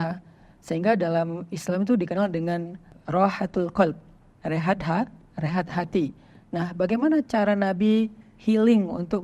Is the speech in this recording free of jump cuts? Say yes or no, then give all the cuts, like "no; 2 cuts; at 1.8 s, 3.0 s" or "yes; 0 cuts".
yes; 0 cuts